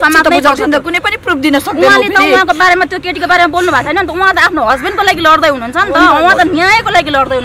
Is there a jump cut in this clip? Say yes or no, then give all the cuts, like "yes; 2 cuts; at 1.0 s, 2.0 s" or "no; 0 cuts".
no; 0 cuts